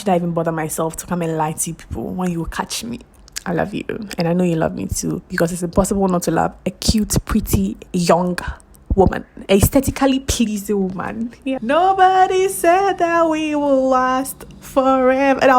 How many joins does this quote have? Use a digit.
2